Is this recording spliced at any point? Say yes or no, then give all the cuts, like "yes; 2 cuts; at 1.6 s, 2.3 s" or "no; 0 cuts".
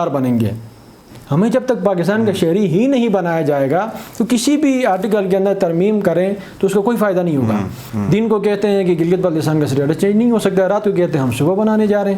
yes; 1 cut; at 7.8 s